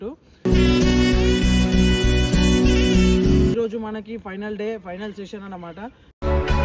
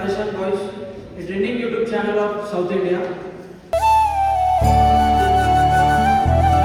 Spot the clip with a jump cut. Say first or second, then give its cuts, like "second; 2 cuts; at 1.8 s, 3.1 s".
first; 1 cut; at 3.5 s